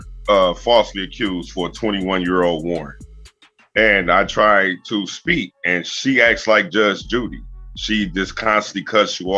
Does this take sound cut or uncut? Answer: uncut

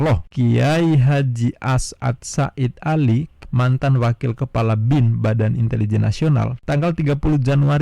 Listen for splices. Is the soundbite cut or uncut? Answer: cut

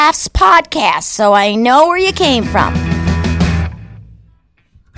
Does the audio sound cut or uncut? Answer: cut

